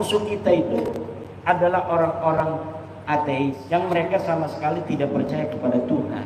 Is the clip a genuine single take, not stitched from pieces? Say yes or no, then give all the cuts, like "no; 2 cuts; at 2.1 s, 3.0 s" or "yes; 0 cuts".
no; 1 cut; at 3.6 s